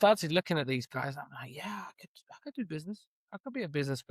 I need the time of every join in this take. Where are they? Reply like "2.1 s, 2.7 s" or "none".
none